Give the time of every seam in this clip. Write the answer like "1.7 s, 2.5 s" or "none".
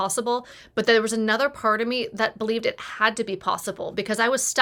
none